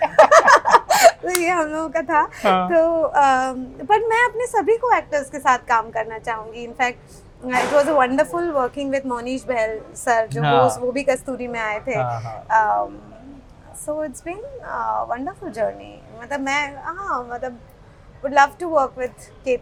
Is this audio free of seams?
yes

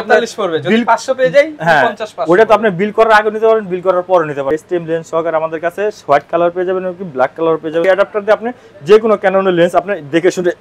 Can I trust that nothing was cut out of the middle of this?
no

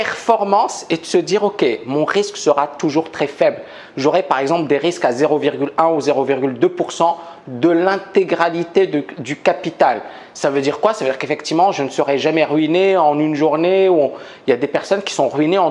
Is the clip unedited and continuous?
yes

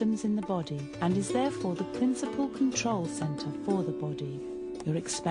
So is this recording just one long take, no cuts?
no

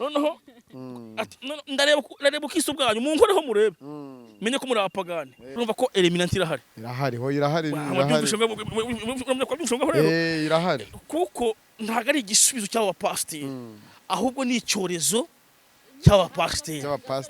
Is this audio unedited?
no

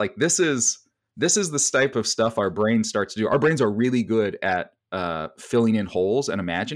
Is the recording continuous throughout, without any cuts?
no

